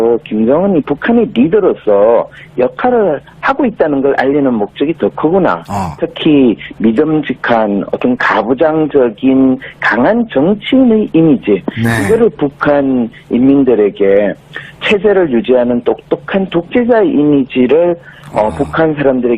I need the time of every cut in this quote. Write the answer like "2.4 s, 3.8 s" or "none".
8.2 s